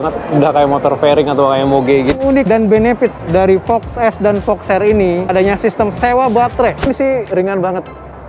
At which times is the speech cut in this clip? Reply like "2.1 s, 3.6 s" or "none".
2.1 s, 6.9 s